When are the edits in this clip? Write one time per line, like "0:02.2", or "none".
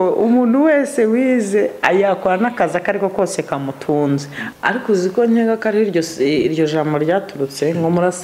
0:04.4